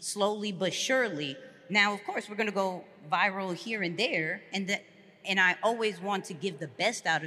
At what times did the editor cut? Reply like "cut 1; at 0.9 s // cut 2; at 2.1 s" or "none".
none